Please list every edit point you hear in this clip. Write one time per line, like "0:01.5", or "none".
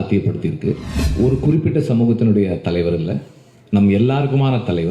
0:01.0